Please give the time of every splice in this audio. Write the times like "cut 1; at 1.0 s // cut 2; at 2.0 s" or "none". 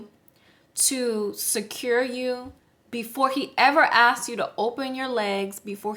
none